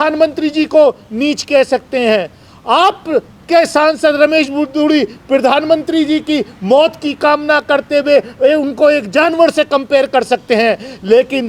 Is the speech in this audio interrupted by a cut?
no; 0 cuts

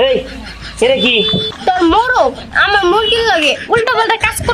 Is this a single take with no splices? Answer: no; 1 cut; at 1.5 s

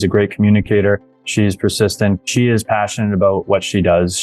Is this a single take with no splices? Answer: no; 1 cut; at 2.2 s

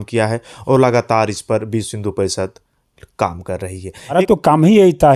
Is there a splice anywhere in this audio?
yes; 1 cut; at 4.1 s

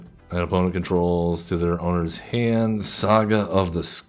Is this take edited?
yes; 1 cut; at 2.9 s

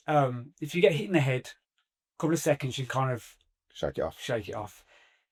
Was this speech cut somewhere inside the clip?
no; 0 cuts

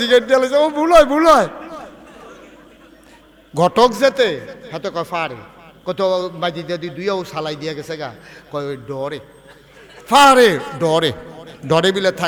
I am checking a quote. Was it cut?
no; 0 cuts

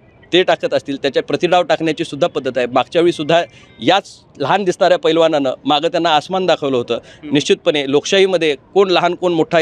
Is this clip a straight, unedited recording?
yes; 0 cuts

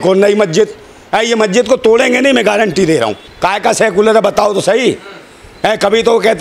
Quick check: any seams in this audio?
yes; 1 cut; at 3.2 s

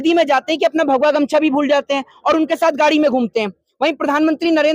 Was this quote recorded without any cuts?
yes; 0 cuts

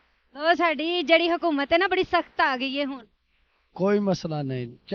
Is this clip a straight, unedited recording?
yes; 0 cuts

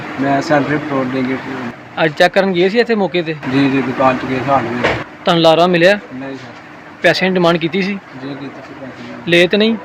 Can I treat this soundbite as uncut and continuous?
yes; 0 cuts

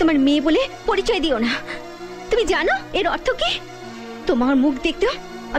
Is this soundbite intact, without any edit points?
yes; 0 cuts

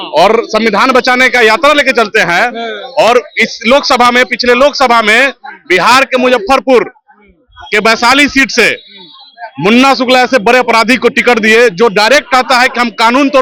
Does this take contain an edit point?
no; 0 cuts

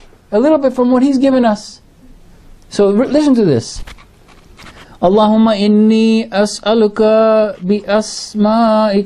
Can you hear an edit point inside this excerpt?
no; 0 cuts

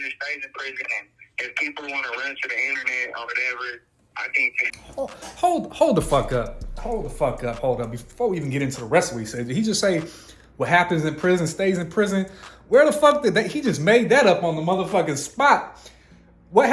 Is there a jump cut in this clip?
no; 0 cuts

